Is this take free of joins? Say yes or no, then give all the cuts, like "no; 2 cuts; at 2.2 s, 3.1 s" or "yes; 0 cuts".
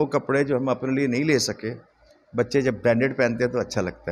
yes; 0 cuts